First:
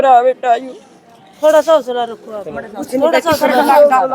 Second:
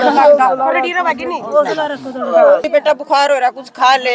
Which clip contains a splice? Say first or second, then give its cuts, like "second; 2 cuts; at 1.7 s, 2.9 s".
second; 1 cut; at 2.7 s